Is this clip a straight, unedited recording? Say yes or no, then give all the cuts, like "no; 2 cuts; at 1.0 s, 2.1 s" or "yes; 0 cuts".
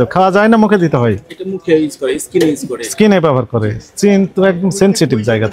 yes; 0 cuts